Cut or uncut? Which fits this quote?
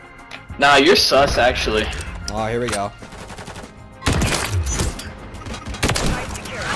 cut